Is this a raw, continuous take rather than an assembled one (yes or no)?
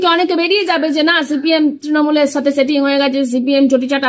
yes